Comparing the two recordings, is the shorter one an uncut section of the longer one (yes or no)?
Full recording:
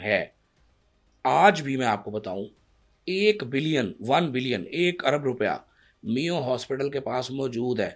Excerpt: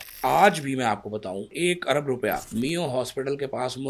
no